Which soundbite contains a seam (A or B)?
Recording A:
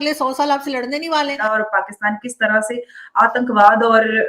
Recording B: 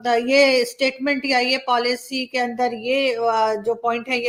A